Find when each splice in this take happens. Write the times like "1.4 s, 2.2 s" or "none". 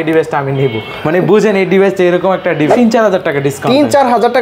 2.7 s